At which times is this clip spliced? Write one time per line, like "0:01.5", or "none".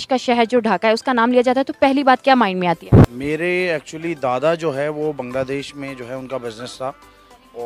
none

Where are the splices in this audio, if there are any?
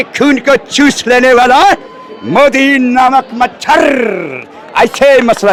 none

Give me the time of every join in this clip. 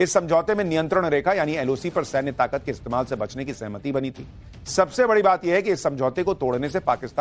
0:01.8

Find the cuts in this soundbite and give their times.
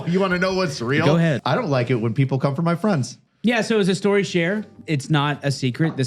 0:01.4
0:03.2
0:04.8

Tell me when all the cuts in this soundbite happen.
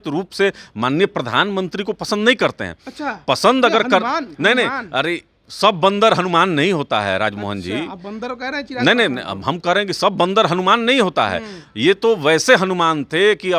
none

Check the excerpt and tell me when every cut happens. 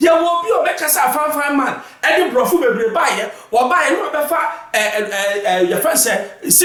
none

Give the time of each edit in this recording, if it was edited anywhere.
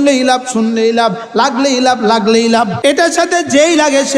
0:02.7

